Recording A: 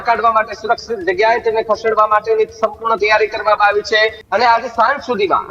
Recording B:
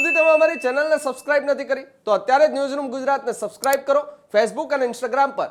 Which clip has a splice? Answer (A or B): A